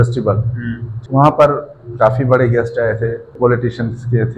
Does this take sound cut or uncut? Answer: cut